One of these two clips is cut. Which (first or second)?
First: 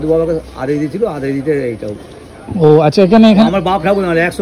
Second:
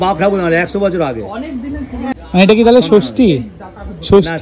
second